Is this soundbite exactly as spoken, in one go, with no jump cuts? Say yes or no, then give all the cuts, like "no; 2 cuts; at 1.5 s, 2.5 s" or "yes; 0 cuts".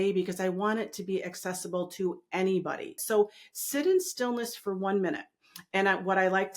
no; 1 cut; at 3.0 s